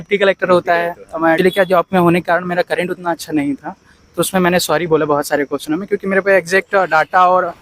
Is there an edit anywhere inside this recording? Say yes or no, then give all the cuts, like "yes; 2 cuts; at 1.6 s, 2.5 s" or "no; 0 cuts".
yes; 1 cut; at 1.4 s